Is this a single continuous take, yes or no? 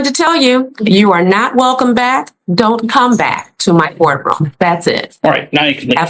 yes